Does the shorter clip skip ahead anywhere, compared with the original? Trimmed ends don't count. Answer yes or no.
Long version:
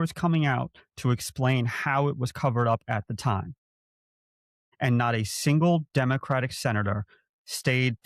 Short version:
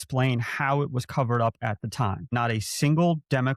yes